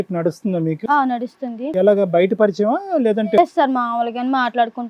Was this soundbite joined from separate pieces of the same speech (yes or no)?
no